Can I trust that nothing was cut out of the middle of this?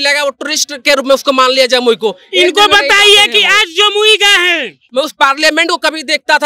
no; 1 cut; at 4.8 s

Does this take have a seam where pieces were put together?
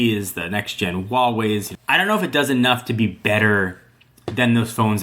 yes; 1 cut; at 1.7 s

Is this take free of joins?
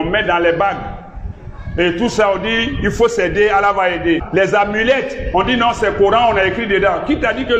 no; 1 cut; at 4.2 s

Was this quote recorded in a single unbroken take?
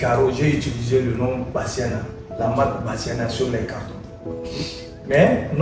yes; 0 cuts

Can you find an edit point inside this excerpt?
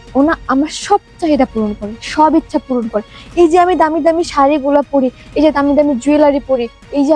no; 0 cuts

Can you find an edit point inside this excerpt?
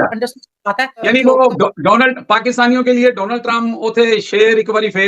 yes; 1 cut; at 1.1 s

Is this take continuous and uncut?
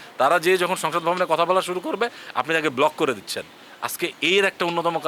yes; 0 cuts

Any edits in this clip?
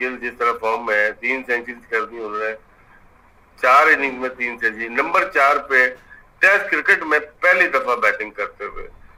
no; 0 cuts

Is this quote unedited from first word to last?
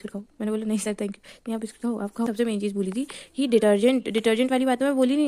no; 1 cut; at 2.3 s

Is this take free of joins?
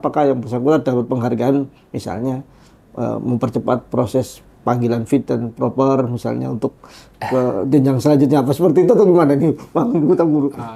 yes; 0 cuts

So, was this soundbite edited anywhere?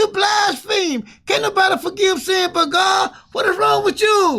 no; 0 cuts

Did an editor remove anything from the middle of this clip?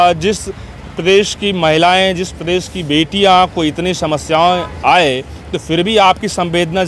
no; 0 cuts

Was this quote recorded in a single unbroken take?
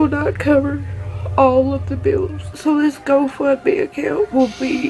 yes; 0 cuts

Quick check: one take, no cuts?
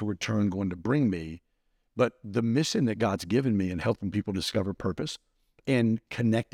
yes; 0 cuts

